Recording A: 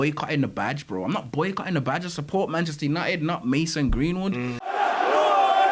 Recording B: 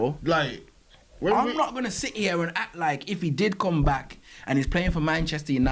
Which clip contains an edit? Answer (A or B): A